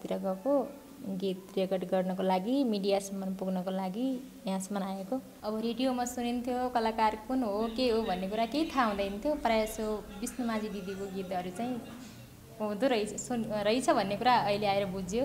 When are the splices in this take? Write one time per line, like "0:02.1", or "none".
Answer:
0:05.3